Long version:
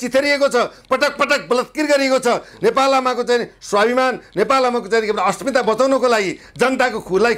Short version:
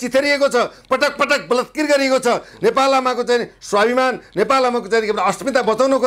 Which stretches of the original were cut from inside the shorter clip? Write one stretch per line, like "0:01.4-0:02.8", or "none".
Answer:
none